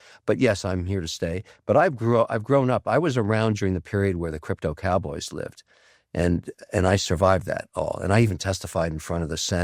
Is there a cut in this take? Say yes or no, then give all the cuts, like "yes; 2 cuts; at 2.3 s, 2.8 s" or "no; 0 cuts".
no; 0 cuts